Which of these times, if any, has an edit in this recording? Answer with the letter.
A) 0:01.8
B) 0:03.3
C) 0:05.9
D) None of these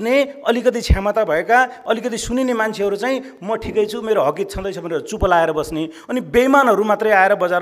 D